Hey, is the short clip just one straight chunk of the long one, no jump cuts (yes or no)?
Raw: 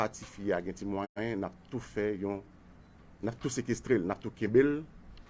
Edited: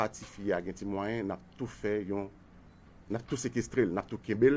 no